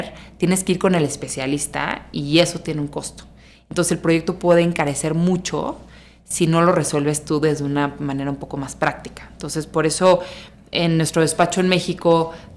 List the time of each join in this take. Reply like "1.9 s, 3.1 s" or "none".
none